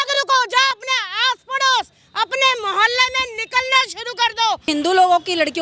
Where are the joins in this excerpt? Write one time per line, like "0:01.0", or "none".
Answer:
0:04.7

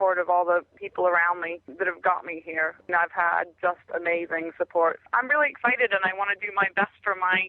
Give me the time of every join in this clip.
0:00.8
0:01.6
0:02.8
0:05.0

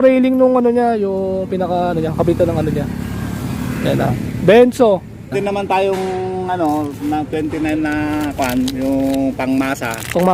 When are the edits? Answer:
0:05.3

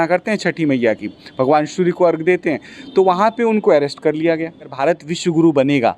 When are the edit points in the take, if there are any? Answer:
0:05.1

